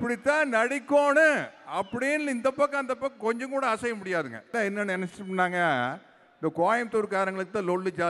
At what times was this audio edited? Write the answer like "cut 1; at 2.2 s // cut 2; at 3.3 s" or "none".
cut 1; at 4.5 s